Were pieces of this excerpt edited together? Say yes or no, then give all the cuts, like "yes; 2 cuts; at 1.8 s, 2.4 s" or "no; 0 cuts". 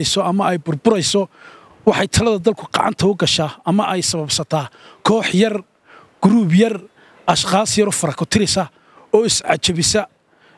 no; 0 cuts